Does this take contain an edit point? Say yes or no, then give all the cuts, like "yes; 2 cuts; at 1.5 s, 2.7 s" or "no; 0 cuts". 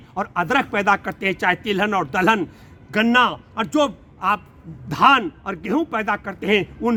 no; 0 cuts